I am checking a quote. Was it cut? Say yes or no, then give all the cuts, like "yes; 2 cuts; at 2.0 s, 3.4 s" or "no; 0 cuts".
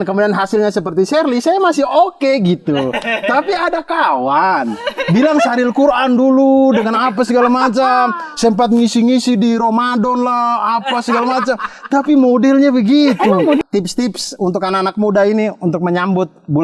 yes; 1 cut; at 13.6 s